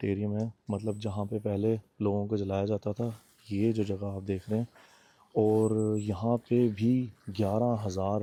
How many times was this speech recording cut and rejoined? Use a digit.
0